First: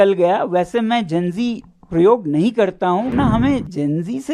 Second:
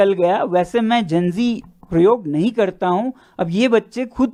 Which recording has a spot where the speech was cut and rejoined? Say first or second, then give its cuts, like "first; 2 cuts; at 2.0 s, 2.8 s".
first; 1 cut; at 3.1 s